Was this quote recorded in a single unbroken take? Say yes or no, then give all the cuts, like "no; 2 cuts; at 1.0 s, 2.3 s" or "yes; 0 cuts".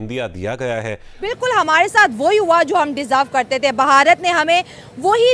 no; 1 cut; at 1.1 s